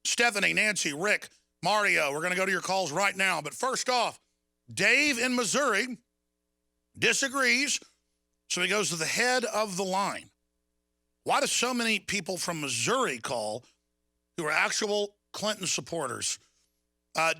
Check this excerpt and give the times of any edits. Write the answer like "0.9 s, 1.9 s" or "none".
12.1 s

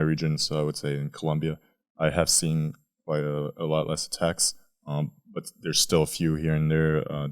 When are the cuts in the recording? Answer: none

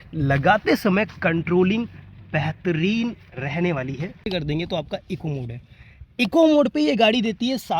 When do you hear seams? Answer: 4.3 s

